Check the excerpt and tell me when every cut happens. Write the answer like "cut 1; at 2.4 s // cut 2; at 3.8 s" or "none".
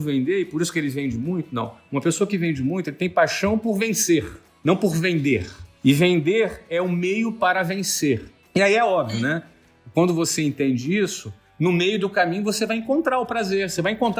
none